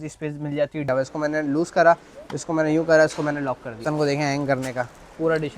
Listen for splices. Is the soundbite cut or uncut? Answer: cut